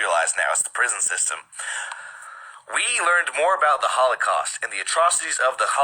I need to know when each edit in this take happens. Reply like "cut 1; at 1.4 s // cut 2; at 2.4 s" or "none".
cut 1; at 2.9 s